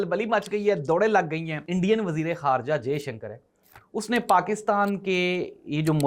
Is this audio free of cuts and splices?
no; 1 cut; at 1.6 s

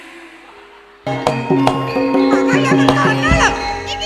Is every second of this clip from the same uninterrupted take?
no; 1 cut; at 1.1 s

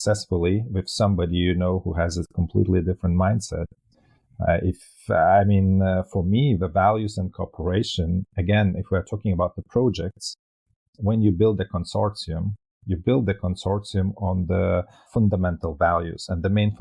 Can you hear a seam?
yes; 1 cut; at 15.1 s

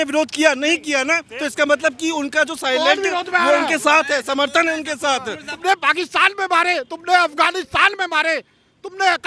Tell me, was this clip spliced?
yes; 1 cut; at 5.4 s

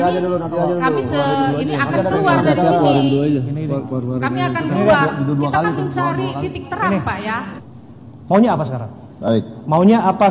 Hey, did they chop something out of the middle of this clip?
yes; 1 cut; at 7.5 s

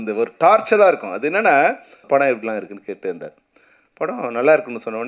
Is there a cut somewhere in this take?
yes; 1 cut; at 2.0 s

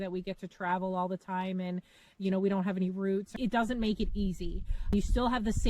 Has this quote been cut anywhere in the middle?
yes; 2 cuts; at 3.3 s, 4.9 s

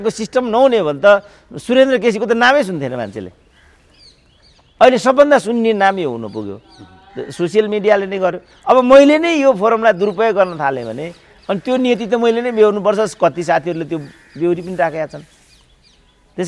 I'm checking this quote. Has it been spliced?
no; 0 cuts

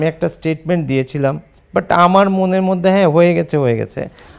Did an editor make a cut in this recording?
yes; 1 cut; at 1.5 s

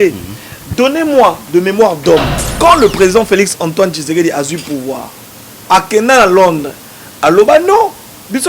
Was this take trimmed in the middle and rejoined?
yes; 1 cut; at 2.4 s

